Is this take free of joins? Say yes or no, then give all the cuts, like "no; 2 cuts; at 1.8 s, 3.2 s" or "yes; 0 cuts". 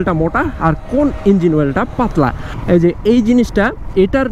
no; 1 cut; at 2.5 s